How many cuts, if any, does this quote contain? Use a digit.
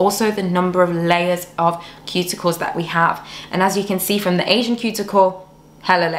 0